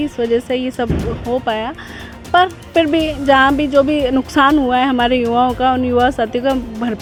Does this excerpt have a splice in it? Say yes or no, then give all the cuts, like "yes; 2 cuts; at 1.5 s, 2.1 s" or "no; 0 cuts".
no; 0 cuts